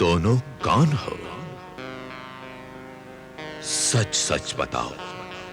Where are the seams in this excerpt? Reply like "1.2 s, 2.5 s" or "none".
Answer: 1.8 s